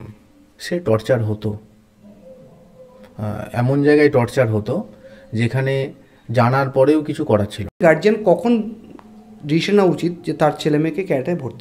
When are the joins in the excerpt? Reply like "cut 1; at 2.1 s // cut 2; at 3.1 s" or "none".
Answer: cut 1; at 7.8 s